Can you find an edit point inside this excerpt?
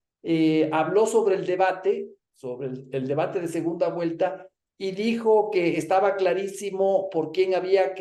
no; 0 cuts

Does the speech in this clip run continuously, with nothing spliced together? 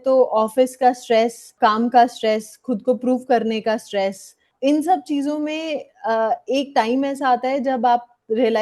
no; 2 cuts; at 1.5 s, 4.5 s

